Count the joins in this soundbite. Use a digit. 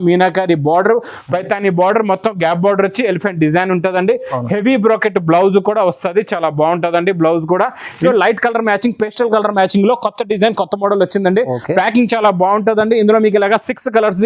1